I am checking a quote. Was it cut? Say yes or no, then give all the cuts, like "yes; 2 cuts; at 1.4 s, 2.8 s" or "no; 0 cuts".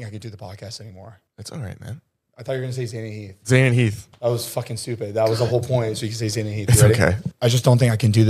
yes; 2 cuts; at 1.3 s, 7.3 s